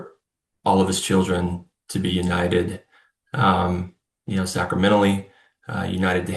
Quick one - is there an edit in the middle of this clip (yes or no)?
no